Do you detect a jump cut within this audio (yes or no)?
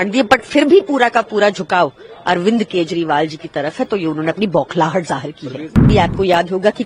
yes